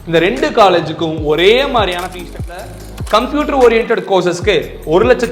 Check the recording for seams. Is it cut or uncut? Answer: cut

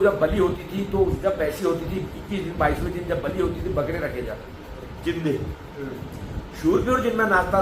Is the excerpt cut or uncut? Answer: uncut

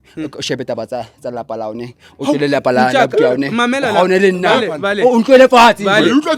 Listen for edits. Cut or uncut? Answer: uncut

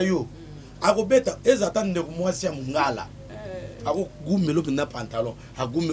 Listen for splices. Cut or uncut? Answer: uncut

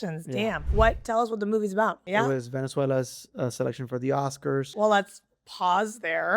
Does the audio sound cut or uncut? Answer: cut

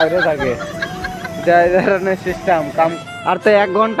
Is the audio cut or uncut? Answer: cut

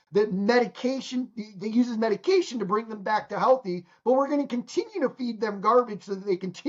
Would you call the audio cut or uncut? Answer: uncut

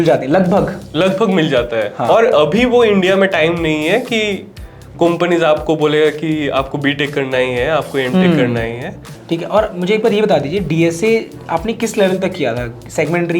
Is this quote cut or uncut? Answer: cut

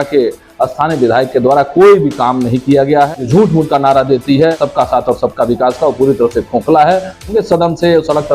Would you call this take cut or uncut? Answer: cut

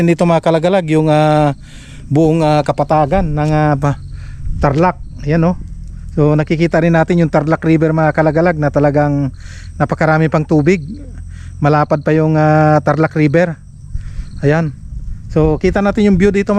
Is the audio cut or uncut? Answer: uncut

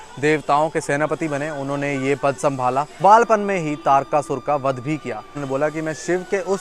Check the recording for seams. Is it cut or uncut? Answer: cut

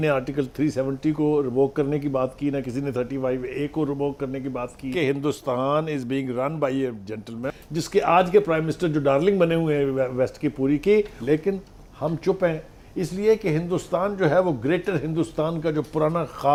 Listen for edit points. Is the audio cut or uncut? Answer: uncut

